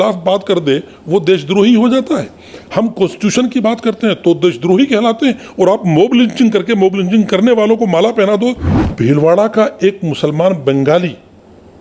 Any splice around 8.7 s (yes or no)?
yes